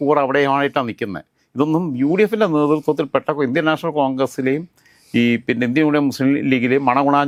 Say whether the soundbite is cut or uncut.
uncut